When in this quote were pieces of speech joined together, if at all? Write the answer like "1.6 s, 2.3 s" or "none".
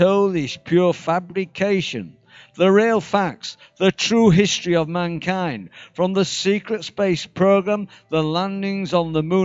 5.1 s